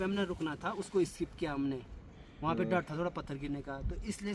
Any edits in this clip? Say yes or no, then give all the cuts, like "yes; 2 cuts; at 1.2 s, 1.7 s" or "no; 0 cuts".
no; 0 cuts